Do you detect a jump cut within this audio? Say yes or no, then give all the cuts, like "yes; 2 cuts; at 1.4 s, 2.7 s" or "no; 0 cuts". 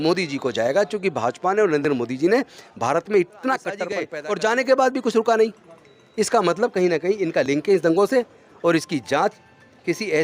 yes; 1 cut; at 4.0 s